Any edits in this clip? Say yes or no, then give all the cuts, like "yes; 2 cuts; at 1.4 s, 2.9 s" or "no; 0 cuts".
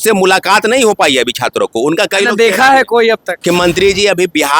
yes; 1 cut; at 3.4 s